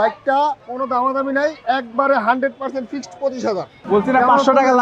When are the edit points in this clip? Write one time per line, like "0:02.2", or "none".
0:03.8